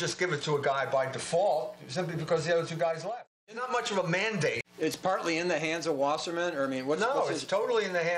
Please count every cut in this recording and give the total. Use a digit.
2